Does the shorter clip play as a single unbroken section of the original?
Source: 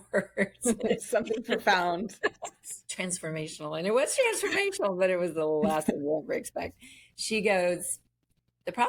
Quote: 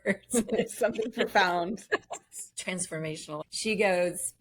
no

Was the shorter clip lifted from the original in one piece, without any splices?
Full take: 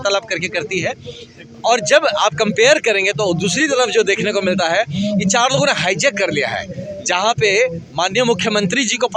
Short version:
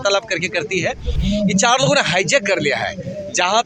no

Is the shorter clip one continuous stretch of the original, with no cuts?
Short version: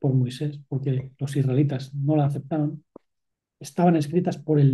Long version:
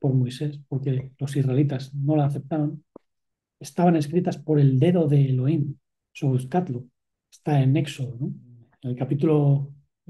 yes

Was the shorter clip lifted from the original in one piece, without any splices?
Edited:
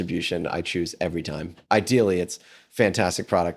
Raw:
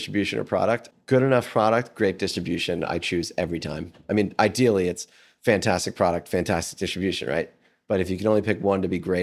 no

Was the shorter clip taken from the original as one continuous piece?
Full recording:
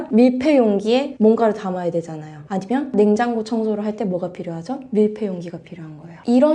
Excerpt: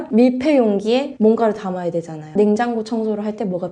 no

